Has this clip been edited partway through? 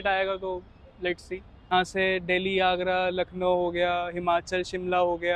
yes; 1 cut; at 1.5 s

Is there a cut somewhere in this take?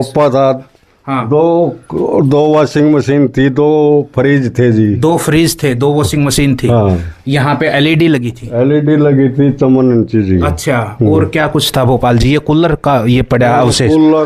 no; 0 cuts

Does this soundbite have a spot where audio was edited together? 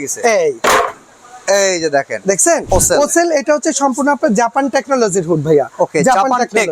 yes; 1 cut; at 2.6 s

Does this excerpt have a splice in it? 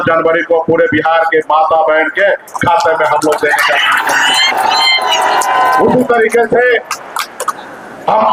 no; 0 cuts

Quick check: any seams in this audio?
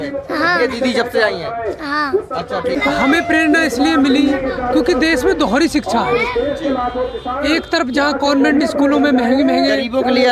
yes; 1 cut; at 2.7 s

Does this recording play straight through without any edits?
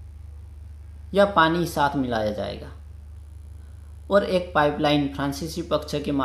yes; 0 cuts

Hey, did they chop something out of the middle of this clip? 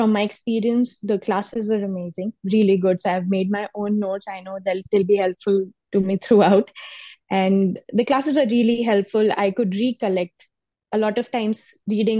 no; 0 cuts

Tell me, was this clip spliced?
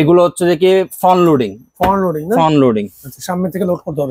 no; 0 cuts

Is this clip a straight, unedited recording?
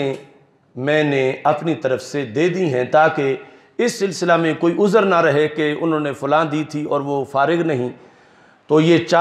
yes; 0 cuts

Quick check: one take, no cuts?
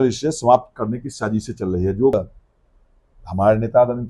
no; 1 cut; at 2.1 s

